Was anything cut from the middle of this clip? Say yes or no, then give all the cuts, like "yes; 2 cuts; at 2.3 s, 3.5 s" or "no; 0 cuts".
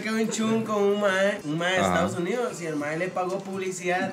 no; 0 cuts